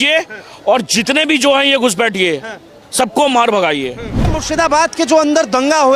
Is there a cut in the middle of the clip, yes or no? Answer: yes